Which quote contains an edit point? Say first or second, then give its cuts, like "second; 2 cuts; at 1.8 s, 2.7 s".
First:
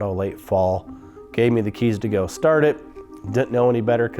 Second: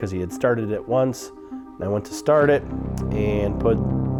first; 1 cut; at 0.9 s